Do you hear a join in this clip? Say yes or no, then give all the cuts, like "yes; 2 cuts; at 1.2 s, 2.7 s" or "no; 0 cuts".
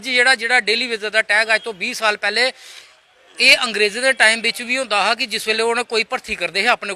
no; 0 cuts